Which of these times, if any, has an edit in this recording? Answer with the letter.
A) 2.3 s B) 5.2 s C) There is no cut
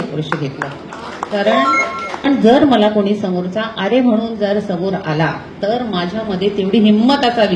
A